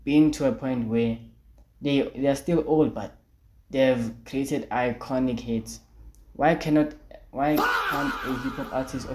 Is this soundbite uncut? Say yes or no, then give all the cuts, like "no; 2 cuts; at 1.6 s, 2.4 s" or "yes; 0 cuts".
yes; 0 cuts